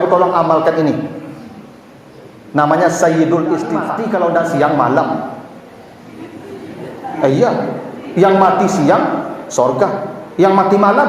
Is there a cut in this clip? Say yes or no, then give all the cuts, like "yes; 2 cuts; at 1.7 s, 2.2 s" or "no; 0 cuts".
yes; 1 cut; at 3.9 s